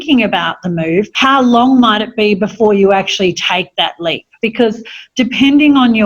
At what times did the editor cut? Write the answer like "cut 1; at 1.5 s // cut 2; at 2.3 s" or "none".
cut 1; at 1.1 s // cut 2; at 4.3 s